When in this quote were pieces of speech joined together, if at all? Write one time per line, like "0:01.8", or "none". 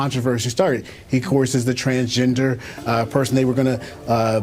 0:03.3

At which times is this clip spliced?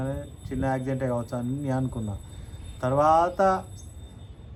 none

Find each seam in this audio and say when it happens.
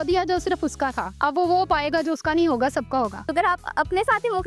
0:01.1
0:03.3

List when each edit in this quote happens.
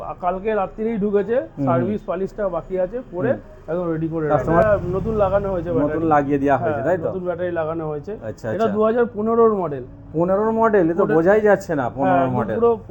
0:04.6

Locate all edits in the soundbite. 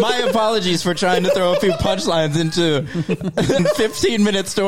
0:03.6

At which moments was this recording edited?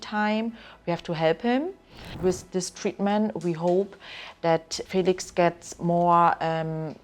0:02.1
0:04.8

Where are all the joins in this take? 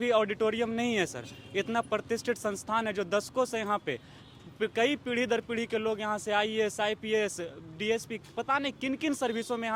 none

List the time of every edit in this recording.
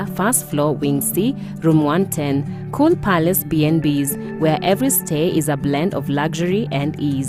none

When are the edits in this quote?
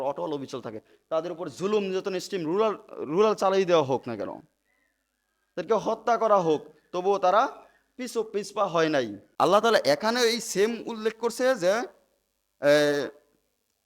0:09.2

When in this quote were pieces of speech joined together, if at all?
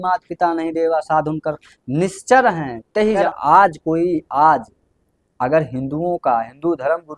0:03.2

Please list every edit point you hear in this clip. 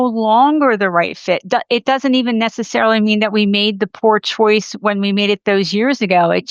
none

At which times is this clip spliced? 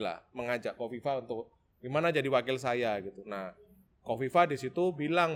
none

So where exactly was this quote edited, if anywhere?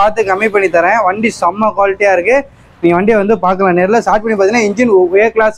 none

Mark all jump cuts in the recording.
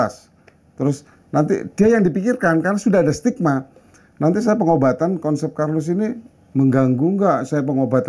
none

